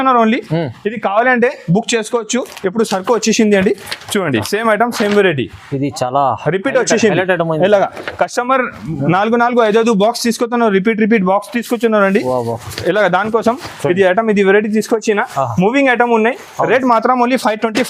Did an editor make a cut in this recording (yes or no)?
no